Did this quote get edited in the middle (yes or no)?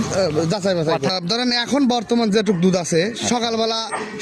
yes